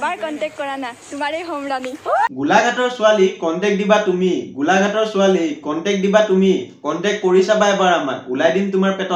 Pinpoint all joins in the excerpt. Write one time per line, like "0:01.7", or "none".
none